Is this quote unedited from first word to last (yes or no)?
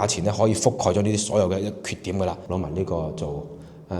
no